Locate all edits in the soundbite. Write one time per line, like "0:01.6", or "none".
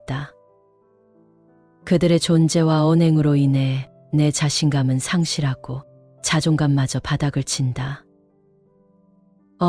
none